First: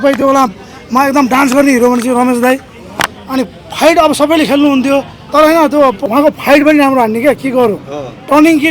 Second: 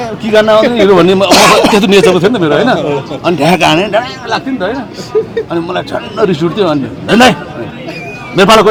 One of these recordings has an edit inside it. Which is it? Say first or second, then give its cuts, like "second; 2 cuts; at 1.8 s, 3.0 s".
first; 2 cuts; at 5.2 s, 6.0 s